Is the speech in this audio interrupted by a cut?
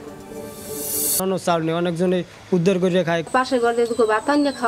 yes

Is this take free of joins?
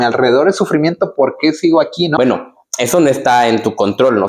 no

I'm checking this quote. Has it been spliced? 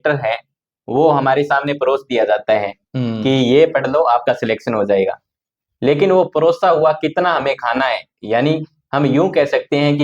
no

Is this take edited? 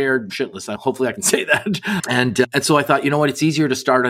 no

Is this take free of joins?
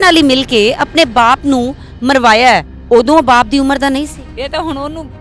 no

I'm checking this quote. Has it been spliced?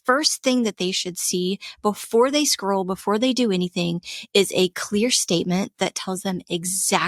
no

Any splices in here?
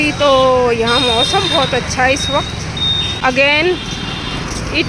yes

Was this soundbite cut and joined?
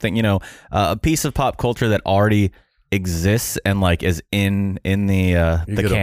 no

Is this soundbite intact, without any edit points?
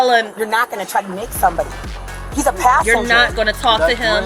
yes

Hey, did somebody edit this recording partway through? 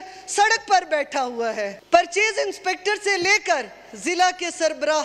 yes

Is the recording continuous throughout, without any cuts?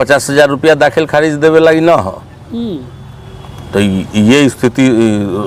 yes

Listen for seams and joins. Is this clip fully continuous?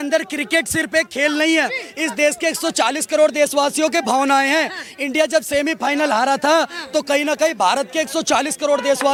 yes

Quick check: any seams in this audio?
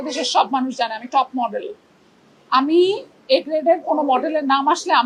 no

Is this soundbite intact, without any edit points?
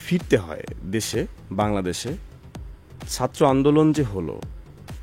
yes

